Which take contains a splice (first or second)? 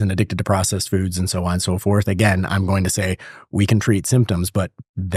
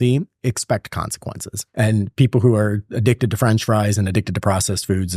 second